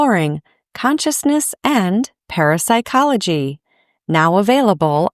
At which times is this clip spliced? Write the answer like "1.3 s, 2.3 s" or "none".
none